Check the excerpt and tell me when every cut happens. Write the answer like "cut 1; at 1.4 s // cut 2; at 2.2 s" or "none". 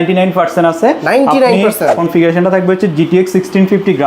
cut 1; at 1.9 s